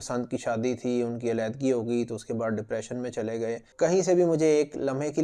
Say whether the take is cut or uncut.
cut